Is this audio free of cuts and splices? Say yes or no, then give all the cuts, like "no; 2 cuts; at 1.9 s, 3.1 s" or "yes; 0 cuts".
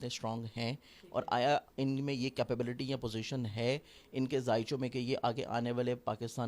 yes; 0 cuts